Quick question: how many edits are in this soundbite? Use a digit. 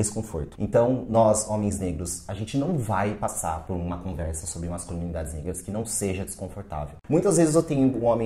1